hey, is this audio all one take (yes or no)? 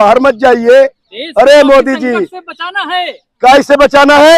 yes